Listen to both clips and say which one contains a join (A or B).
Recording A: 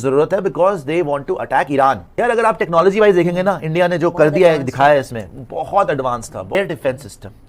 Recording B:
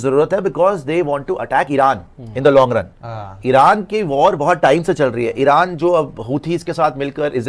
A